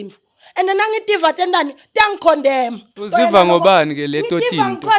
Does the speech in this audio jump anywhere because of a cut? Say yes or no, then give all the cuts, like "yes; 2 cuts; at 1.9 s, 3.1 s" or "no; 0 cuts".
yes; 1 cut; at 2.9 s